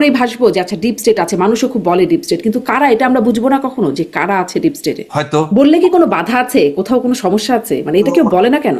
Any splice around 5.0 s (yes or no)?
yes